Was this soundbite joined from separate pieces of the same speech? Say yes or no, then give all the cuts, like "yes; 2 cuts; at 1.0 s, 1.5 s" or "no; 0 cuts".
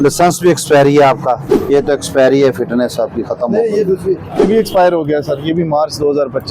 yes; 2 cuts; at 1.5 s, 4.4 s